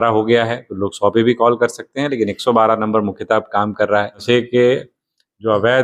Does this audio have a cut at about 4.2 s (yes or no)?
yes